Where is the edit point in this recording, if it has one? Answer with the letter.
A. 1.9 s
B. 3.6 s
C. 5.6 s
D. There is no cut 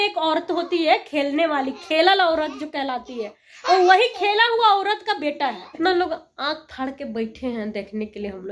C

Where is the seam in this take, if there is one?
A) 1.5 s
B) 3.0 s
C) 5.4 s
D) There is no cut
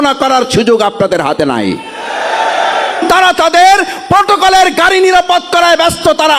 B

